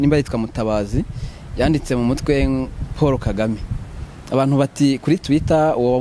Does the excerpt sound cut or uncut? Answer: uncut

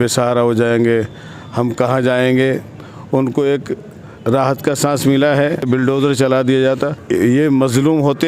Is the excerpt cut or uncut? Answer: cut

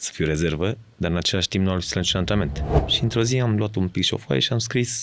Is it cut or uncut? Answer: cut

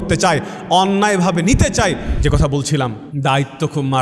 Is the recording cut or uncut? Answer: cut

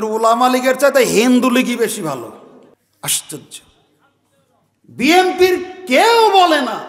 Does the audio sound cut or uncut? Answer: cut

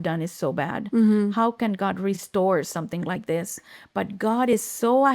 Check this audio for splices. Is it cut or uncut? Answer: cut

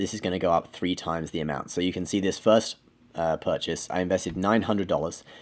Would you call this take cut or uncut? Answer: cut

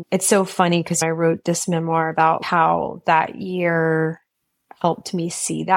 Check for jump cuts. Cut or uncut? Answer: cut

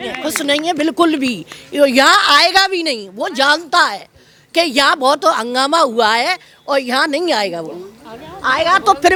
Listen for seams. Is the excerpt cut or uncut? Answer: uncut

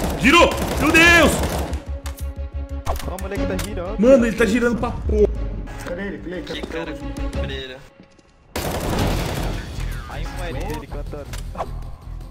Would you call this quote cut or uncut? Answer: uncut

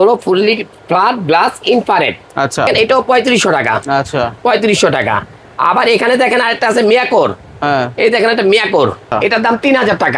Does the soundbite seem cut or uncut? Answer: cut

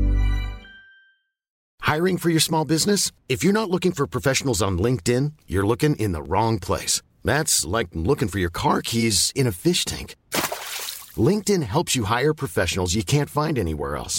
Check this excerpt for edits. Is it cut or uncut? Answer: cut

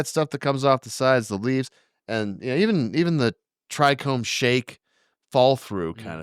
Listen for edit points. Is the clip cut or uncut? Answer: uncut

